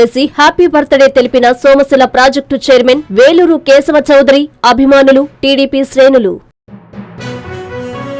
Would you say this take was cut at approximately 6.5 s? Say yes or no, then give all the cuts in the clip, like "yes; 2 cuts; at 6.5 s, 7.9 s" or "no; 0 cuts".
yes; 1 cut; at 6.5 s